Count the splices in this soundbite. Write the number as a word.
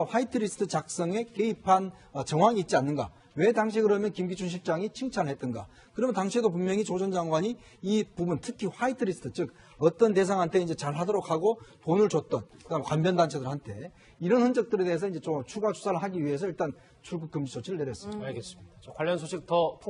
zero